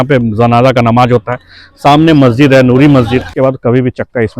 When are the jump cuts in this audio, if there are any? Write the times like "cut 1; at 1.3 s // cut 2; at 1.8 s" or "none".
cut 1; at 3.3 s